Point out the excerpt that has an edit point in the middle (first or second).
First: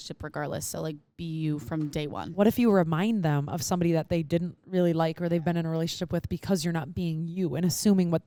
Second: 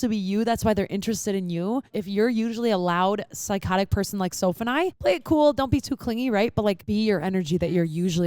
second